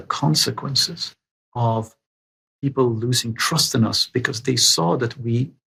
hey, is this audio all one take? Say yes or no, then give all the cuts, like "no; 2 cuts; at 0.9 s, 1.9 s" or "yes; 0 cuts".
yes; 0 cuts